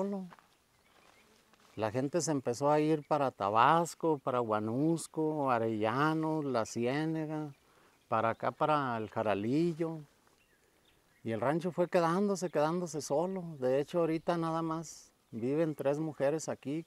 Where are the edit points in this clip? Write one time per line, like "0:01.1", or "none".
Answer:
none